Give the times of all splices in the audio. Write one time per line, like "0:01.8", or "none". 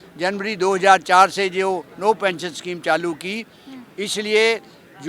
none